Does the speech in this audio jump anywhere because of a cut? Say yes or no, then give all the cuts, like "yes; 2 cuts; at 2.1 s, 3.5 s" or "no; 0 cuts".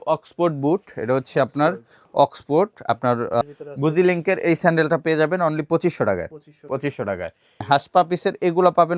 yes; 2 cuts; at 3.4 s, 7.6 s